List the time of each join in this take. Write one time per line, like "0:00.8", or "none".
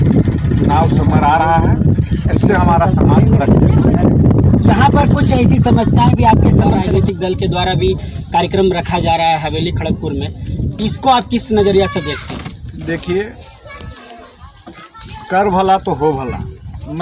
0:07.0